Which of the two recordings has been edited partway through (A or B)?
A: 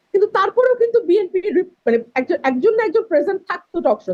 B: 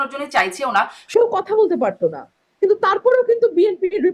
B